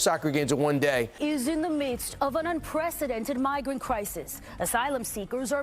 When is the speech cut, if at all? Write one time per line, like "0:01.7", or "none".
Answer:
0:01.1